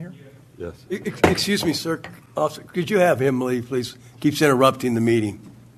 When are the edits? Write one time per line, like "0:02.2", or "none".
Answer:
none